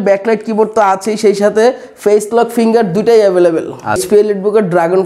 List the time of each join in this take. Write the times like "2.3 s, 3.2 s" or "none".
4.0 s